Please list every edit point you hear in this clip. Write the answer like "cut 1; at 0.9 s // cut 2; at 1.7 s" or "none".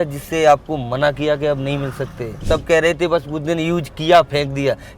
cut 1; at 2.4 s